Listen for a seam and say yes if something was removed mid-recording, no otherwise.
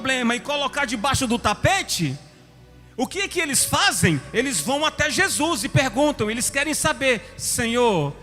no